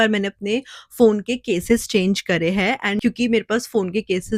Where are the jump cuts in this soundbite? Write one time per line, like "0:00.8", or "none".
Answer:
none